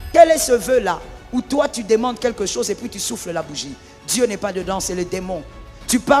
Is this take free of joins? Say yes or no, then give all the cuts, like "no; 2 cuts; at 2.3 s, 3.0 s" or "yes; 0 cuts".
yes; 0 cuts